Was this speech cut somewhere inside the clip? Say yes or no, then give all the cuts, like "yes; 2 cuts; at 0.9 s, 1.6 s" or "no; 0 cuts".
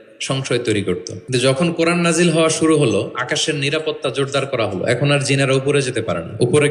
yes; 1 cut; at 1.1 s